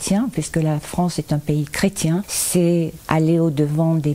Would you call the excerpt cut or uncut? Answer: cut